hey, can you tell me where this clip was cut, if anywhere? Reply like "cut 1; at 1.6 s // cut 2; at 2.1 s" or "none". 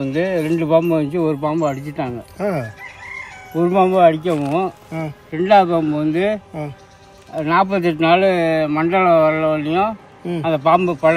none